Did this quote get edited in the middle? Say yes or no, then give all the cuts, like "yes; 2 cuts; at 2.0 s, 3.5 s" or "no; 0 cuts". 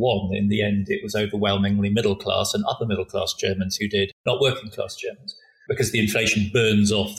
yes; 2 cuts; at 4.2 s, 5.5 s